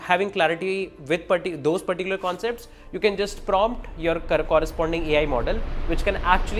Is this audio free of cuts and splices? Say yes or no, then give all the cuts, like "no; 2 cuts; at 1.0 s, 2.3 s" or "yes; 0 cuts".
yes; 0 cuts